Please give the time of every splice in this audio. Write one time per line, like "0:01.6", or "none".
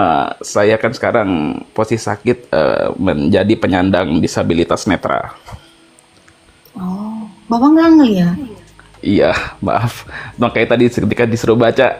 none